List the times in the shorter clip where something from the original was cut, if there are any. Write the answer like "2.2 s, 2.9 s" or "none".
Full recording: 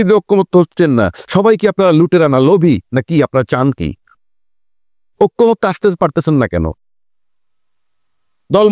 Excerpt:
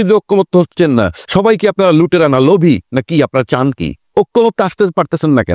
3.9 s